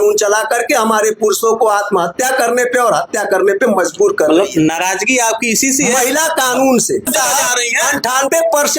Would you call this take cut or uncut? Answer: cut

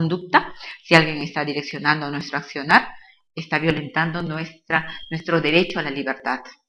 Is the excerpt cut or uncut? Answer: uncut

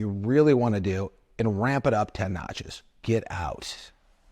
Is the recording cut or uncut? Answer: cut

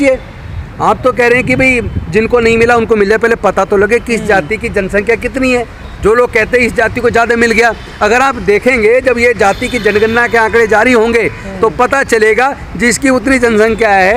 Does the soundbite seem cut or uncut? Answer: uncut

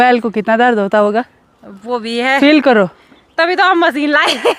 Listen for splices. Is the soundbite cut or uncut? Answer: uncut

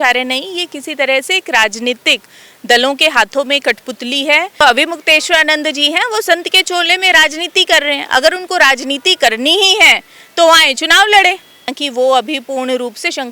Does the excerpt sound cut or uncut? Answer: cut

